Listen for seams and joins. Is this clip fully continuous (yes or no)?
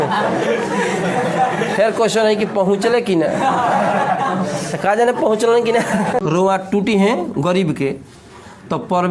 no